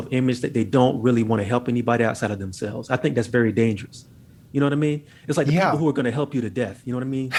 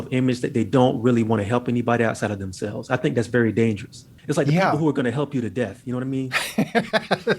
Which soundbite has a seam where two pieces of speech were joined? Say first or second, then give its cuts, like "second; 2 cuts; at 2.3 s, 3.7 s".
second; 1 cut; at 4.1 s